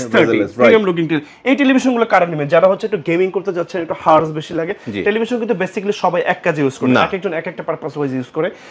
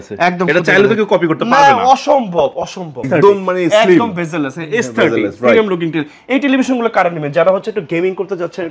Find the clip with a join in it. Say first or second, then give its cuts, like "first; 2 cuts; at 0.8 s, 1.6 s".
second; 1 cut; at 3.1 s